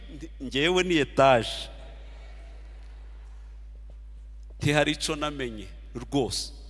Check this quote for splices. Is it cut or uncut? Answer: uncut